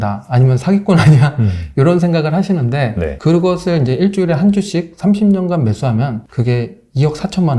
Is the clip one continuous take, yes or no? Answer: no